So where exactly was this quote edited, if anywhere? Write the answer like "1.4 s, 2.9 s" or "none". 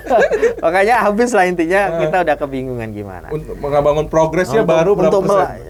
none